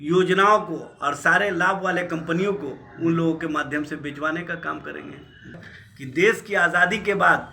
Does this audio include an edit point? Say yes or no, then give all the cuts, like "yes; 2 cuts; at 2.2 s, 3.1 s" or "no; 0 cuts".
yes; 1 cut; at 5.7 s